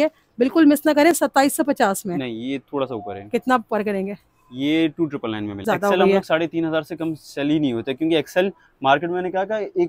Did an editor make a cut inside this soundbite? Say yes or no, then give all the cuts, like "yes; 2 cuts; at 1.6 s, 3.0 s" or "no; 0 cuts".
no; 0 cuts